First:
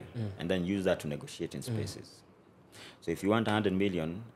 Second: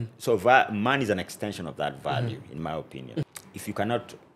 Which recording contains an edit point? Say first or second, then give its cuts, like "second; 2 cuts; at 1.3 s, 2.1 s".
second; 1 cut; at 3.3 s